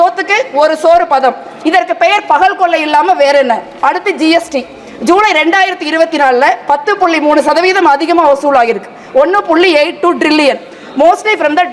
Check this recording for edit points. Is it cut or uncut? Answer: uncut